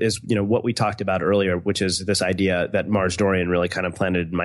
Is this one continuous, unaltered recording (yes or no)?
yes